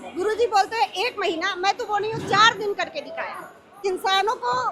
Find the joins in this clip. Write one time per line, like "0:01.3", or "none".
0:03.8